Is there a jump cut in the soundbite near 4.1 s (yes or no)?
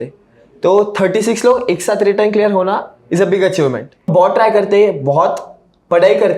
yes